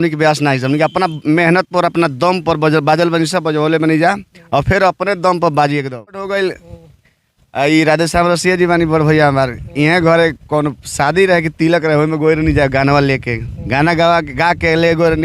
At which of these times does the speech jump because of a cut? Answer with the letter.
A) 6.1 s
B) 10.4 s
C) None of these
A